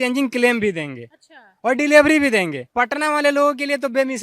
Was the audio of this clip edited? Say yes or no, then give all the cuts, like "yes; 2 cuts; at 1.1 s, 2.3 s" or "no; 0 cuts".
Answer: no; 0 cuts